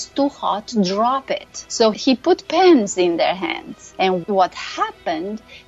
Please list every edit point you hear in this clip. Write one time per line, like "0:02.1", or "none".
0:02.0
0:04.2